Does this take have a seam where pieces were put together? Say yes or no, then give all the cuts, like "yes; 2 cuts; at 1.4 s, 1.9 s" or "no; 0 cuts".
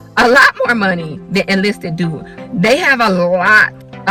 no; 0 cuts